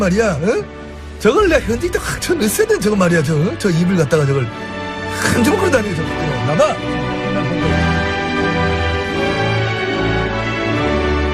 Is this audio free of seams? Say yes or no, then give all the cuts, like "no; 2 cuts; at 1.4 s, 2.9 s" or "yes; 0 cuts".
yes; 0 cuts